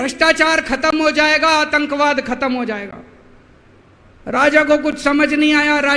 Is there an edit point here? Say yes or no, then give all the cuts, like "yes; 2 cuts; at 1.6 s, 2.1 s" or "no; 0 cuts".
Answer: no; 0 cuts